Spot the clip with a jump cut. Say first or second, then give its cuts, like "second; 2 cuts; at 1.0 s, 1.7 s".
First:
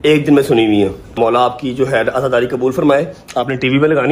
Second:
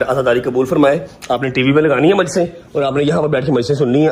first; 1 cut; at 1.2 s